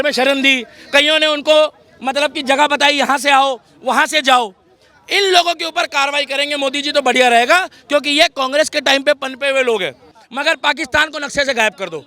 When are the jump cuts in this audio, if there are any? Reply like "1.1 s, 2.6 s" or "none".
10.2 s